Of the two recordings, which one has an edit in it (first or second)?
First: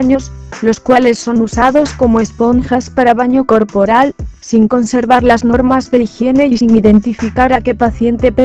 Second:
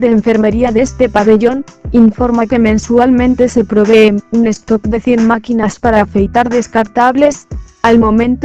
first